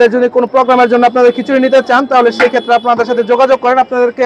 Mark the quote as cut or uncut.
uncut